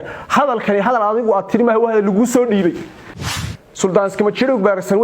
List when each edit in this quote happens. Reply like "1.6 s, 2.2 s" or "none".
3.3 s